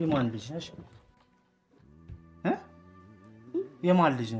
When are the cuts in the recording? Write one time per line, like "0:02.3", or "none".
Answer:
none